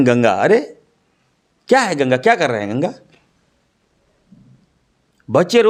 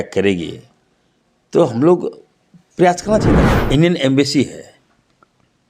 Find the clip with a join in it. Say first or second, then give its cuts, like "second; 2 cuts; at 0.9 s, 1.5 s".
second; 1 cut; at 3.3 s